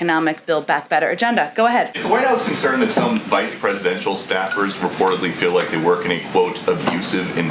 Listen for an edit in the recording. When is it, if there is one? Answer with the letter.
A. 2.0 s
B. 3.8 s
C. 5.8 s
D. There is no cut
A